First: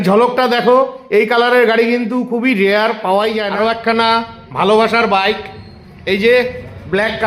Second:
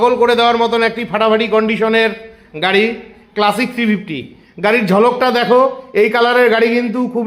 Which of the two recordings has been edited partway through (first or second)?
first